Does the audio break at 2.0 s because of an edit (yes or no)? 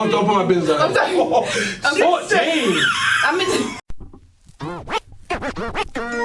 no